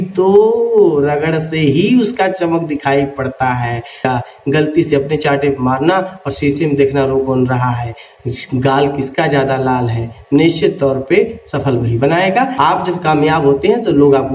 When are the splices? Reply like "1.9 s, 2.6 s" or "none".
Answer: 4.0 s, 12.5 s

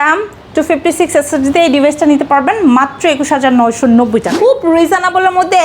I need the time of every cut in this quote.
4.3 s

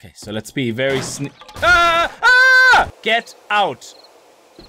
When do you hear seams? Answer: 3.0 s

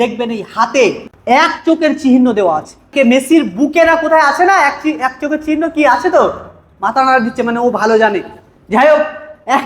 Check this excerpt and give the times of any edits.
1.1 s, 2.9 s

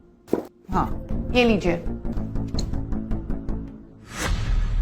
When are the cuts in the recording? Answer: 1.0 s, 2.2 s

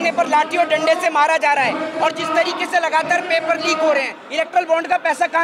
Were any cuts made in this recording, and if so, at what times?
4.2 s

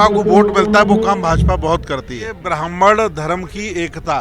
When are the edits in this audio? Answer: 2.5 s

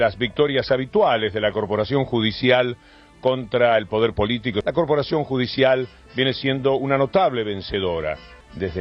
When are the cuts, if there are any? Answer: 4.6 s

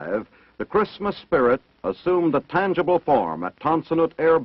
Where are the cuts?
none

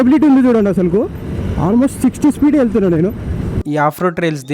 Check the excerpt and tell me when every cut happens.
3.6 s

